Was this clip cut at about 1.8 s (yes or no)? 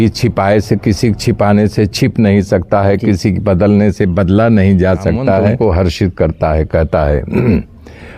no